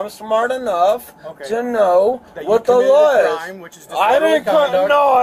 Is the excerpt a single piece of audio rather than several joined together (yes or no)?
yes